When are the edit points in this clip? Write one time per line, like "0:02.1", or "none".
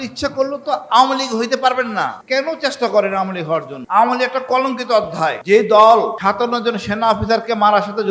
0:02.2
0:03.8
0:05.4
0:06.2